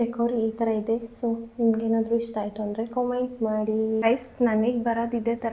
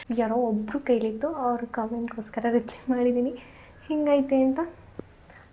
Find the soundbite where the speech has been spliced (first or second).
first